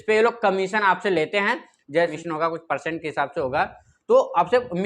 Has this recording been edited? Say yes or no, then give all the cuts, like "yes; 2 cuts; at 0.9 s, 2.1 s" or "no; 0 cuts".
yes; 1 cut; at 2.2 s